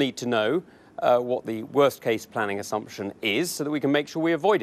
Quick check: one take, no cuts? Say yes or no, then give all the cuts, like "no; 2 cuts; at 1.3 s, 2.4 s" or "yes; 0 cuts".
yes; 0 cuts